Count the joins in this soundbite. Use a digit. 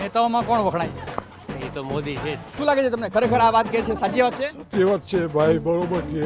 1